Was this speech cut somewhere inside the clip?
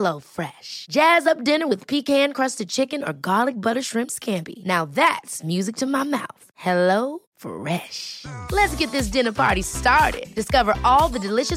no; 0 cuts

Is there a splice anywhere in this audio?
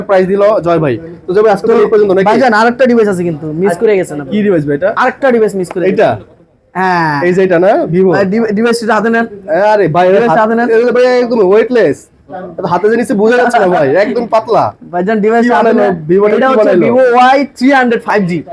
no; 0 cuts

